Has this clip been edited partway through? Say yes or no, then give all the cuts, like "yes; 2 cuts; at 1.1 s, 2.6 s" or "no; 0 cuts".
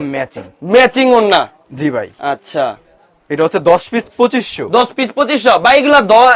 no; 0 cuts